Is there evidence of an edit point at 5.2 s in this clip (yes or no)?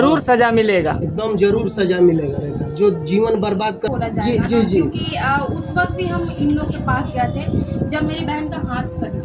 no